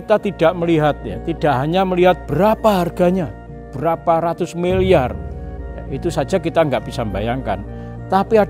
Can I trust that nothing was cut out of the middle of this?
yes; 0 cuts

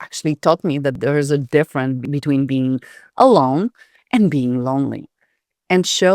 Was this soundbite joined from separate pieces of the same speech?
yes; 2 cuts; at 1.0 s, 2.1 s

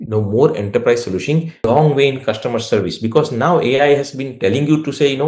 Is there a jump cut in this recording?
yes; 1 cut; at 1.6 s

